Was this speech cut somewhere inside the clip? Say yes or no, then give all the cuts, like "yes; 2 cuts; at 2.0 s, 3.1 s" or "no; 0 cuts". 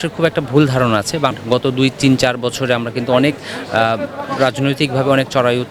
yes; 1 cut; at 1.4 s